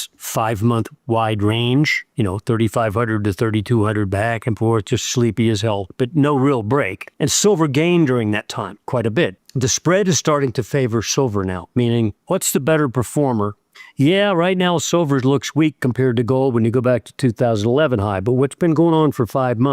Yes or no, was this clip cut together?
yes